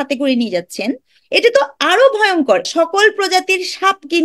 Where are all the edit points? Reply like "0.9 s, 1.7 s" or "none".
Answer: 2.7 s